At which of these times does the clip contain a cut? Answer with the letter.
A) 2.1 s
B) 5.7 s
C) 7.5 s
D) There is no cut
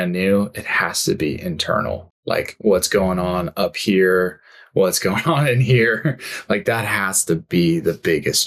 A